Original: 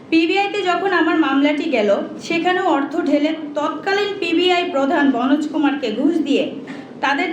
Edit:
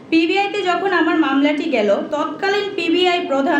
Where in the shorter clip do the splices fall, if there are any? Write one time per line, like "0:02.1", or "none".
0:02.1